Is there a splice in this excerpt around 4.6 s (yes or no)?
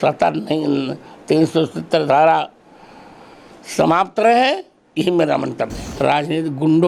no